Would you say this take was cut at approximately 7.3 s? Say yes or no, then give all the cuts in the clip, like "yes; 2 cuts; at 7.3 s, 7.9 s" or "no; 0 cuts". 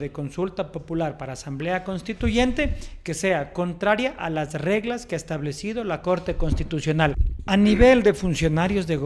yes; 1 cut; at 7.3 s